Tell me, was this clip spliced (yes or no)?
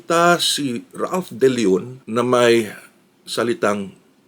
no